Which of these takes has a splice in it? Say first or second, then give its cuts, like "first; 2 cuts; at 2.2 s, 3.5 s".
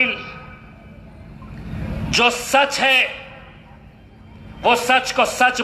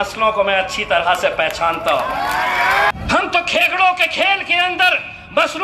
second; 1 cut; at 2.9 s